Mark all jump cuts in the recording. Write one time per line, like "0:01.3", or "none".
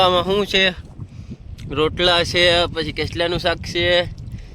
none

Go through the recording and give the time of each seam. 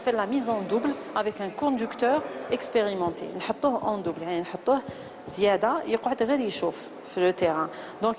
0:02.4

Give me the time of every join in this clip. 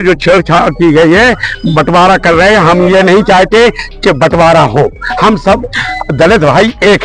none

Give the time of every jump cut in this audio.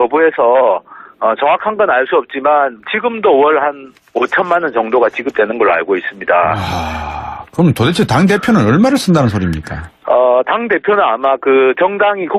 0:02.5

